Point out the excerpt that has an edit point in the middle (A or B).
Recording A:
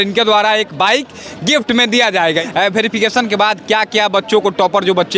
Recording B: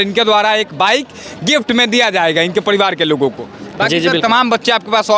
A